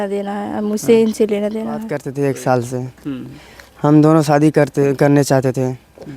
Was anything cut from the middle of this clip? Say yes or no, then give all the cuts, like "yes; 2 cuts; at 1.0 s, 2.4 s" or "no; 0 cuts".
yes; 1 cut; at 2.0 s